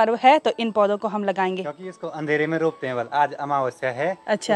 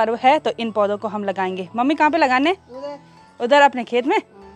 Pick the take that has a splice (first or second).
first